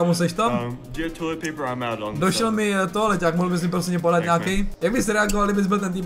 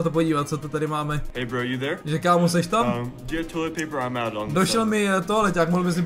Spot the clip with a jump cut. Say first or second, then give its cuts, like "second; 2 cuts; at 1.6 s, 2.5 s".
first; 1 cut; at 4.7 s